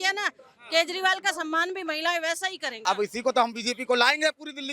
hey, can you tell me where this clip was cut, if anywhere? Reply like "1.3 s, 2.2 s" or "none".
2.8 s